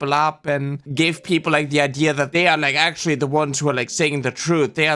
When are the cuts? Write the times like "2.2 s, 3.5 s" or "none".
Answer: 0.9 s, 2.3 s